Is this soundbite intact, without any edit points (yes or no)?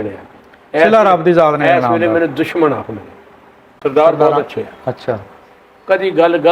no